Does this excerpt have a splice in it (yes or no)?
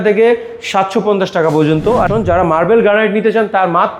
yes